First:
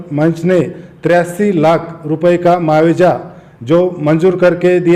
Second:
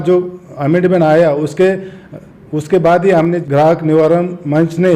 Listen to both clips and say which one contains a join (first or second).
second